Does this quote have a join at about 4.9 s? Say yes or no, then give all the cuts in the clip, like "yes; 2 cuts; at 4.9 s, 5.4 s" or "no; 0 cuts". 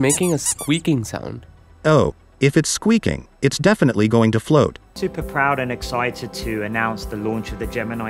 no; 0 cuts